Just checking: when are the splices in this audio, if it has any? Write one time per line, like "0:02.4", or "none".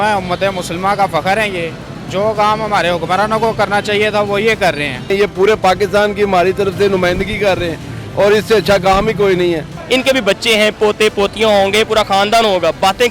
0:05.1
0:09.7

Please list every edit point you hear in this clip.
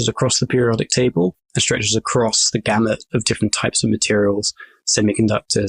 0:01.5

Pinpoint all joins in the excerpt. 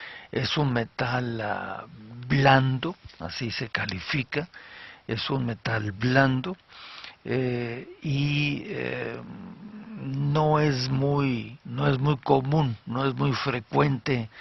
none

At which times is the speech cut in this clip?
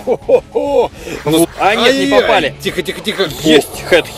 0:01.4

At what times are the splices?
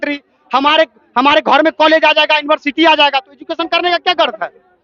none

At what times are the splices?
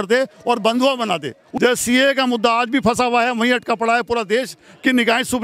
0:01.4

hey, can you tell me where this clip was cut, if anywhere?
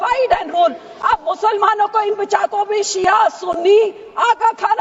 none

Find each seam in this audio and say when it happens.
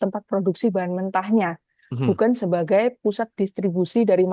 none

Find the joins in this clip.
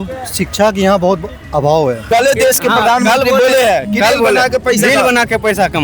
0:02.0

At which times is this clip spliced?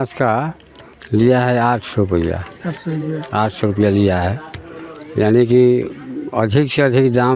none

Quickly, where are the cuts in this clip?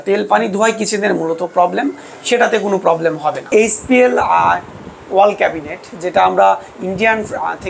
0:03.5

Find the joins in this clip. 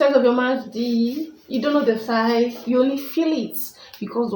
none

